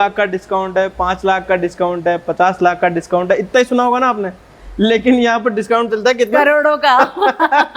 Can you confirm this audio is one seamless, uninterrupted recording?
yes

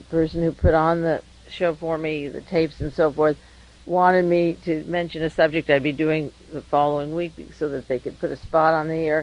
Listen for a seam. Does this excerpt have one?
yes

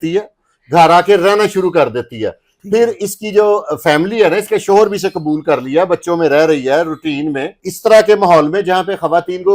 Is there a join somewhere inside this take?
yes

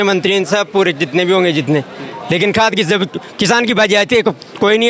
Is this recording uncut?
yes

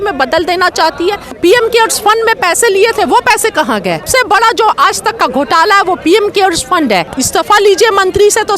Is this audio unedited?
no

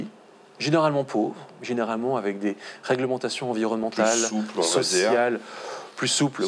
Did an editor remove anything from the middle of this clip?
no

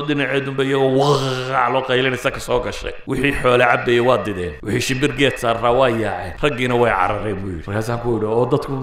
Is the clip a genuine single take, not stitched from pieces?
no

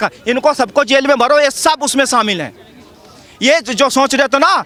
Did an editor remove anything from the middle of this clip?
no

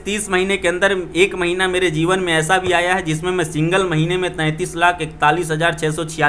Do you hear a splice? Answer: no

